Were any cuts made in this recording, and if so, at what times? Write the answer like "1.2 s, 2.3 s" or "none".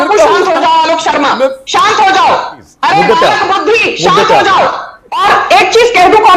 2.5 s, 5.2 s